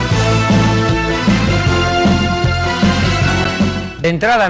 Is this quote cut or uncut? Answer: uncut